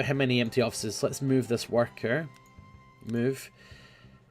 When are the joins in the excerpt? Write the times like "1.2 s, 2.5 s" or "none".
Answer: 2.5 s